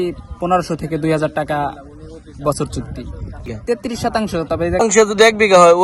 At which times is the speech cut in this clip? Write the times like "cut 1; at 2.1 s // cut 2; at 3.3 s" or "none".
cut 1; at 3.5 s // cut 2; at 4.8 s